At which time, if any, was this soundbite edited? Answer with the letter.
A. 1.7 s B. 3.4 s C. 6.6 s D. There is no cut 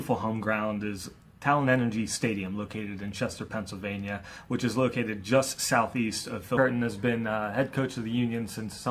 D